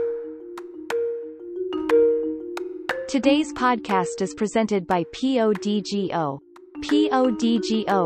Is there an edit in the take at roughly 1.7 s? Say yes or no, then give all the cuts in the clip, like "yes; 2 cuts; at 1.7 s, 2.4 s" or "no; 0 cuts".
no; 1 cut; at 3.0 s